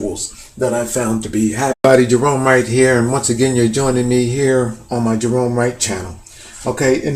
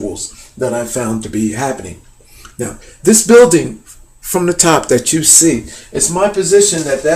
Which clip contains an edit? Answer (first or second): second